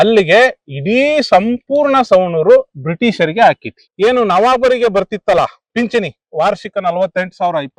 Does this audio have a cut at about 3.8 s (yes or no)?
yes